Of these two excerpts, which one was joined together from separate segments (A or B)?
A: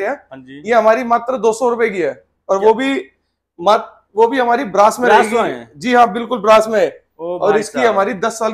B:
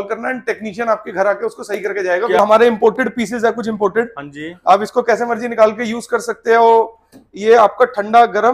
B